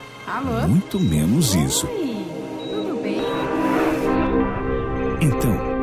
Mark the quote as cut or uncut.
uncut